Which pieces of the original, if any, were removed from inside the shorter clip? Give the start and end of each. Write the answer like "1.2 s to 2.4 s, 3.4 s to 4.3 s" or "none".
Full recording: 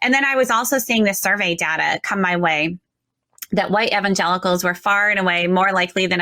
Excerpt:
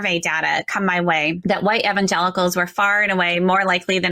2.7 s to 3.5 s